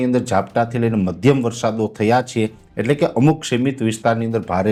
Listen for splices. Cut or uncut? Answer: uncut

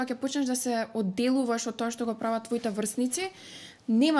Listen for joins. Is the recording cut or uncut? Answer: uncut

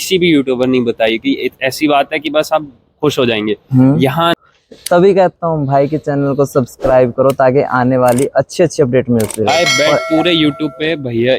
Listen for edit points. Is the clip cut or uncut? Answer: cut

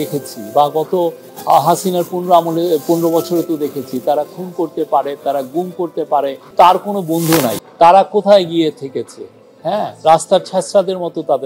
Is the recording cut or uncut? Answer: cut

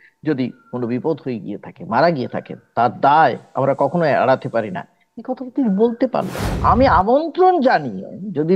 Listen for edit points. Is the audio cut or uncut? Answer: cut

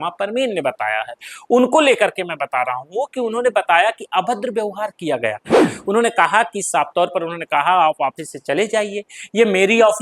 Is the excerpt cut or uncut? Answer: cut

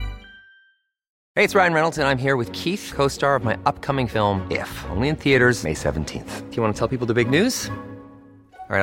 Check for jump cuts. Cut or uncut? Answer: cut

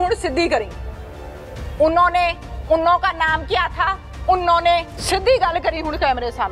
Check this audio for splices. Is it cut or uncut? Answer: cut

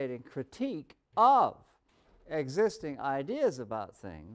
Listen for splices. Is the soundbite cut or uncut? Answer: uncut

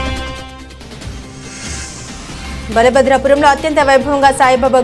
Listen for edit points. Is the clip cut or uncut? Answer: cut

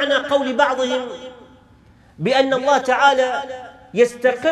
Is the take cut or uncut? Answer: uncut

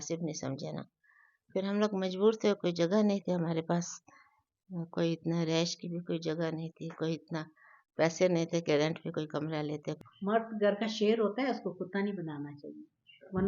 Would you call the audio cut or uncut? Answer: cut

